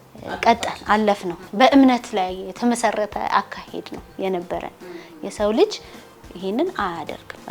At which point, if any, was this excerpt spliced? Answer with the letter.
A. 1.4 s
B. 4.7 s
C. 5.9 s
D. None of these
A